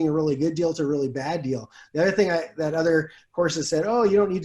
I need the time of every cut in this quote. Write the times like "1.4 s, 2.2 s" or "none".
none